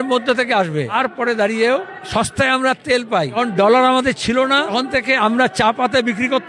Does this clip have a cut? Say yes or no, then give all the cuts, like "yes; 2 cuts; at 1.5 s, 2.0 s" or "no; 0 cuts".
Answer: yes; 4 cuts; at 0.9 s, 2.0 s, 3.4 s, 4.7 s